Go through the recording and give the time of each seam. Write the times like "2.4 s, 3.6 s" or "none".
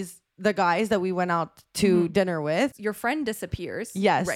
none